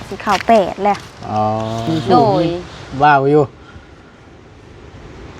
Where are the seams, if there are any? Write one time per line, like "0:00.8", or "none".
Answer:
0:01.9